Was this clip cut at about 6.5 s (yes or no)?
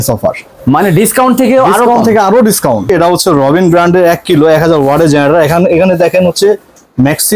no